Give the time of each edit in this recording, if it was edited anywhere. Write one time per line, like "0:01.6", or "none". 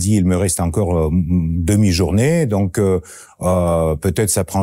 none